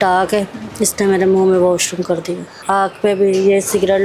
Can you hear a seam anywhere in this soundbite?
yes; 1 cut; at 2.5 s

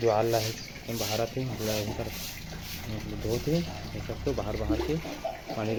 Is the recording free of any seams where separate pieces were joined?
yes; 0 cuts

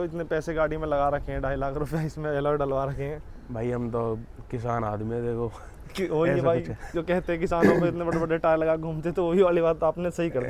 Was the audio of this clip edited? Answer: no; 0 cuts

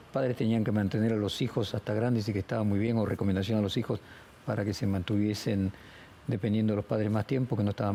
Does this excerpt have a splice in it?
no; 0 cuts

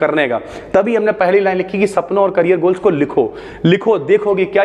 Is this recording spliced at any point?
no; 0 cuts

